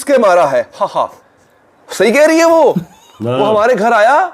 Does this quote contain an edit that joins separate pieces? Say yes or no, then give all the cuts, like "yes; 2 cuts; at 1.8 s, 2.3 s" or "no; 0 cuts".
no; 0 cuts